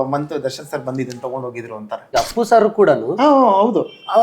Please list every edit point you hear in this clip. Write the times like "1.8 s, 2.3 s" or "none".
2.0 s

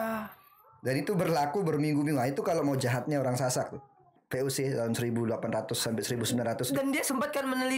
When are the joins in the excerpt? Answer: 4.2 s

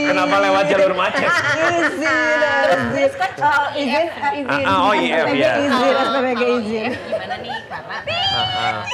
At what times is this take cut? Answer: none

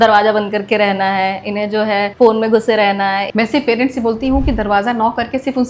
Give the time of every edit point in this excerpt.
2.1 s, 3.2 s

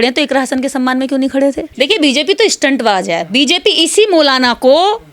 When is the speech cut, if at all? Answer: 1.7 s

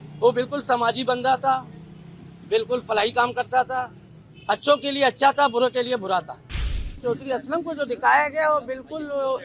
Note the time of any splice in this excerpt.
6.9 s

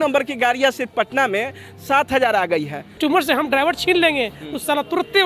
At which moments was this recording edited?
3.0 s

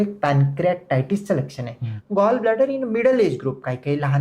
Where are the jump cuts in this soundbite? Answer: 1.9 s

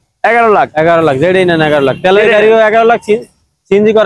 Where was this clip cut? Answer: none

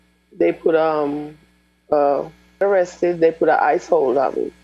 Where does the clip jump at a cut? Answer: 2.6 s

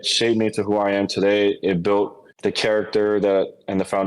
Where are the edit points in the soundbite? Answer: 2.2 s

